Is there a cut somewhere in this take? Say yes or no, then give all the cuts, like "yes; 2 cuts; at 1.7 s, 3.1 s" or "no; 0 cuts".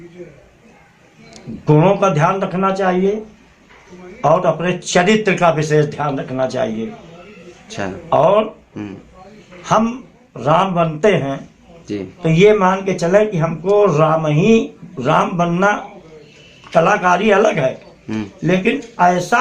no; 0 cuts